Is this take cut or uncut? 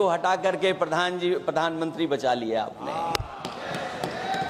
uncut